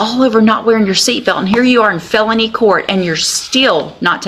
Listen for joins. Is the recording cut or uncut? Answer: uncut